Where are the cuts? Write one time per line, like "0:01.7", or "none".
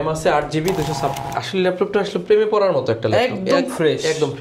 0:01.1